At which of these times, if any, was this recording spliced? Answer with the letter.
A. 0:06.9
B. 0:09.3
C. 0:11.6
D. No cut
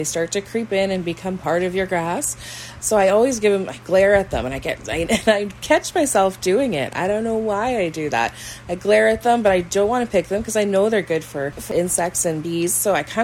C